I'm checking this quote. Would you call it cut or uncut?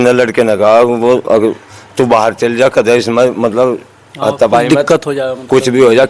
uncut